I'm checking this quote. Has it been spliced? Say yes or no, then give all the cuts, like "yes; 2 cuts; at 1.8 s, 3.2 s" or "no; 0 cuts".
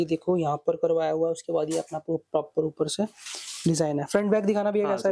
no; 0 cuts